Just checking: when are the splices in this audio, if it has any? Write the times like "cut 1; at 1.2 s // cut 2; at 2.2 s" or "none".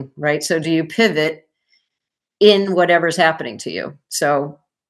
none